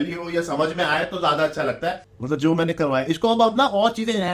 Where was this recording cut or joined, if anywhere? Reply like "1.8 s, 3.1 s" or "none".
2.1 s